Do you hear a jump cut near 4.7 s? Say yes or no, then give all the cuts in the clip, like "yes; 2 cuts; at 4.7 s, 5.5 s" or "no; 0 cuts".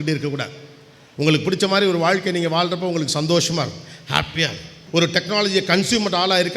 yes; 1 cut; at 4.7 s